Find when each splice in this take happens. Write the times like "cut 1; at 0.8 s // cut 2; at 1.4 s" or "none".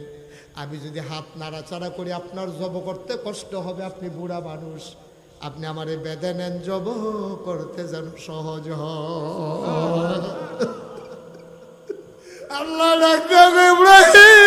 cut 1; at 12.6 s